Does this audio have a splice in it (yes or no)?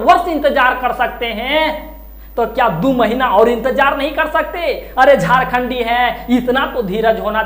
no